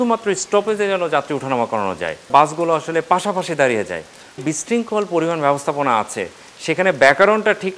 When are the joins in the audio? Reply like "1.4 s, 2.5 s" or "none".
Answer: 2.3 s, 4.4 s